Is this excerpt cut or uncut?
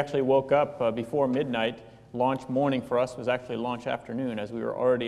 uncut